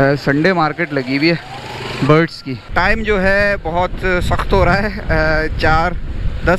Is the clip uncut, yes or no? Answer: no